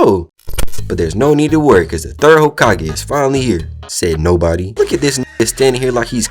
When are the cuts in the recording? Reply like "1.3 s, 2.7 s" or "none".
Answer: 0.9 s